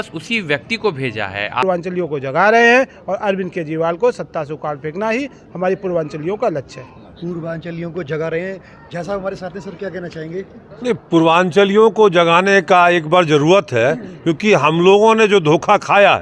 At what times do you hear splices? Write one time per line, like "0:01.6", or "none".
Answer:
0:01.6